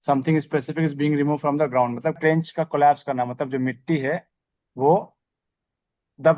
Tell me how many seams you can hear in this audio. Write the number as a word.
one